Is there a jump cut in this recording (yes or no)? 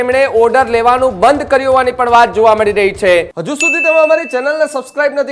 yes